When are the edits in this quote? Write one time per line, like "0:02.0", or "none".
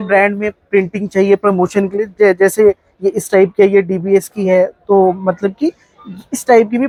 none

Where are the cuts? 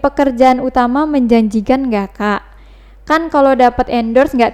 none

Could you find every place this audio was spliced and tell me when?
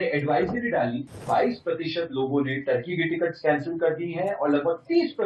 0:01.2

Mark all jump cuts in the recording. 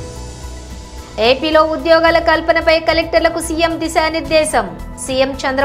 0:00.9

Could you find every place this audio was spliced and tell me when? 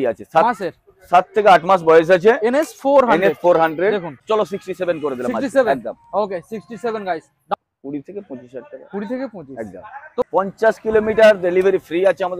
0:04.1
0:07.5
0:10.2

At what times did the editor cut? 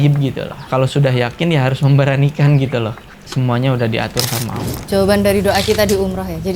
0:04.8

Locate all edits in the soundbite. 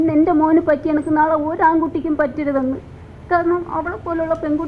none

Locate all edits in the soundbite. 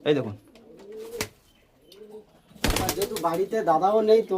none

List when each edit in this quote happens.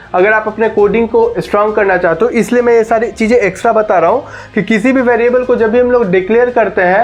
none

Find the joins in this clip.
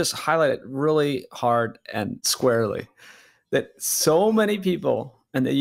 0:02.2

